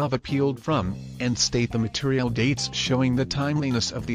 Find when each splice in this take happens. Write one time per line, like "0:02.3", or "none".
0:01.0
0:03.1